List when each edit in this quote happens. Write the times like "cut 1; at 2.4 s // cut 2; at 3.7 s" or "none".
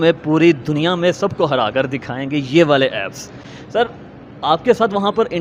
none